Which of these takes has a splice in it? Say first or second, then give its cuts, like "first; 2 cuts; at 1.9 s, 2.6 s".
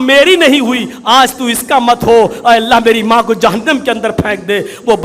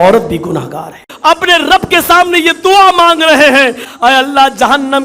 second; 2 cuts; at 1.1 s, 3.9 s